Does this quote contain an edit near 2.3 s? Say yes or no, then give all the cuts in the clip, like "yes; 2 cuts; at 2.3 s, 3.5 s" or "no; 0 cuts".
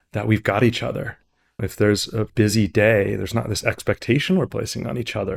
yes; 2 cuts; at 1.6 s, 2.3 s